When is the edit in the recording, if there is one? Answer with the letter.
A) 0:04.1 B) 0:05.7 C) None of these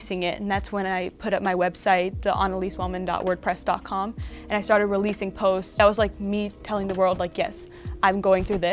B